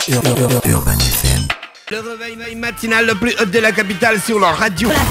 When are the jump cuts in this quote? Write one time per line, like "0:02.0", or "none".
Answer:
0:02.1

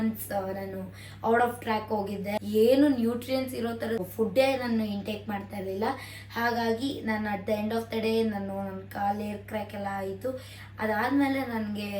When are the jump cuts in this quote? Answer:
0:02.4
0:04.1

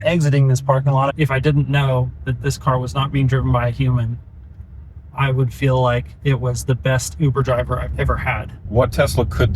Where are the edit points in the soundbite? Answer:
0:01.1
0:08.5

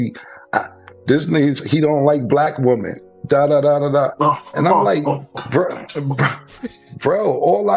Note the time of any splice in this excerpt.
none

